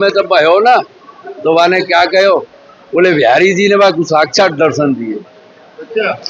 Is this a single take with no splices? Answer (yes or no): yes